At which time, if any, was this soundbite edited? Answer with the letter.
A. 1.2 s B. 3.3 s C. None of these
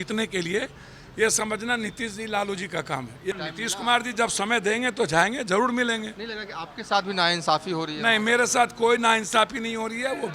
B